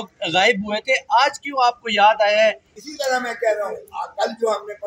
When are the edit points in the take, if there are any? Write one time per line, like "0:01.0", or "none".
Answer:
0:02.7

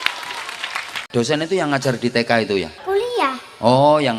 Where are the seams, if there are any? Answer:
0:01.0
0:02.7

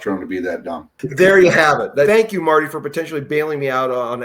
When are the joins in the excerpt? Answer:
0:01.0
0:02.1

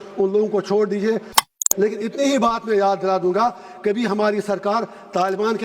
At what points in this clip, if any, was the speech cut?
0:01.5

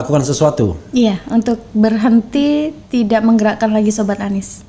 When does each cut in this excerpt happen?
none

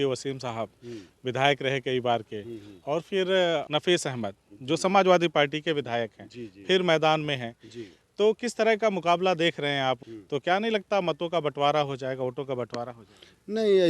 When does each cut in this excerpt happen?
0:03.7
0:10.0

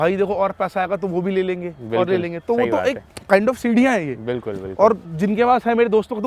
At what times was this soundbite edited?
none

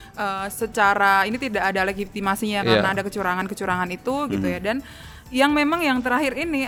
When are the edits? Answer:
none

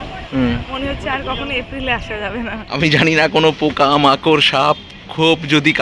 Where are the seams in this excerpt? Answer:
0:02.6

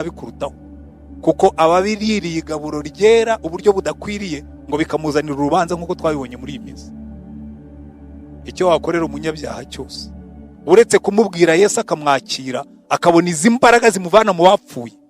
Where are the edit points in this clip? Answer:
0:06.9
0:08.2

